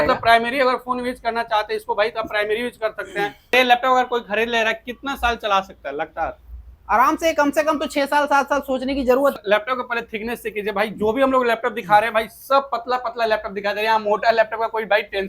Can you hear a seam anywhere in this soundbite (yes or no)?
yes